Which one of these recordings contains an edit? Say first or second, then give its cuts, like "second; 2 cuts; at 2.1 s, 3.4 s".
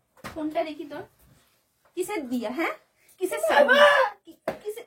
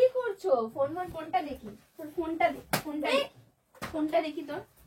second; 1 cut; at 1.1 s